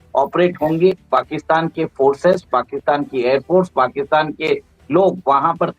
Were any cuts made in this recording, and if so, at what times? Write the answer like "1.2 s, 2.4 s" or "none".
1.0 s